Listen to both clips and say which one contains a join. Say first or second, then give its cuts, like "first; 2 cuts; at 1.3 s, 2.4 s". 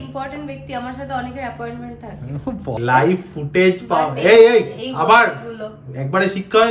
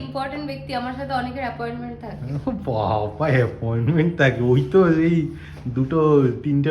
first; 1 cut; at 2.8 s